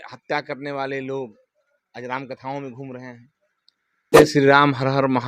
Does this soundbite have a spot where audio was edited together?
yes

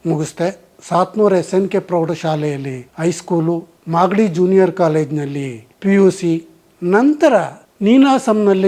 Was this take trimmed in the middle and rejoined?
no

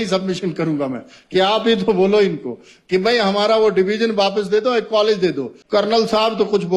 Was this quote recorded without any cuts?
no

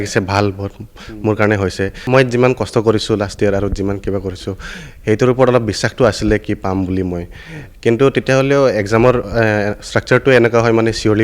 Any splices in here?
yes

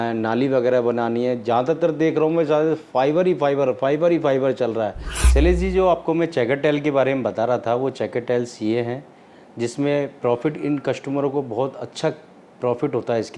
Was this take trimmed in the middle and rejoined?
yes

